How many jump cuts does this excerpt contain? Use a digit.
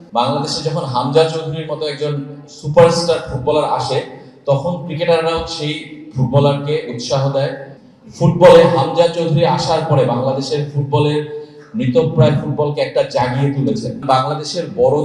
2